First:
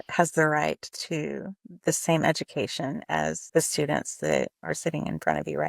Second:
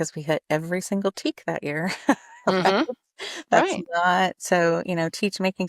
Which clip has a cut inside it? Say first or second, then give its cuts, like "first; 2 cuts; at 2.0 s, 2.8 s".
first; 2 cuts; at 3.4 s, 4.6 s